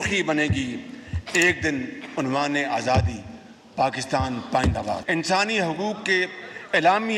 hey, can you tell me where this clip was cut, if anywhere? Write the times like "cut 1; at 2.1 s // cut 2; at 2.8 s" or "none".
cut 1; at 5.0 s